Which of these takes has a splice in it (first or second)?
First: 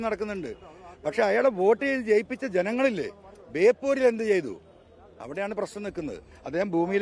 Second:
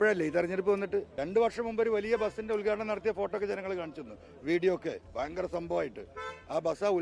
second